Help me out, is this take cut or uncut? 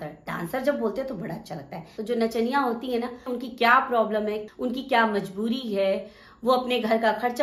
cut